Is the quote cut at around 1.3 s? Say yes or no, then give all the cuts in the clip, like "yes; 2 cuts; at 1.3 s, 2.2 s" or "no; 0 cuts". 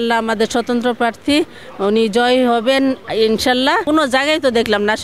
no; 1 cut; at 3.8 s